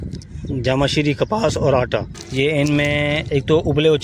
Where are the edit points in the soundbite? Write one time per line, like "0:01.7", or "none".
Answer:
0:02.2